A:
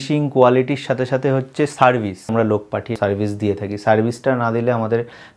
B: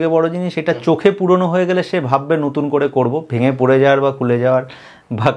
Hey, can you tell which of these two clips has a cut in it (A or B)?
A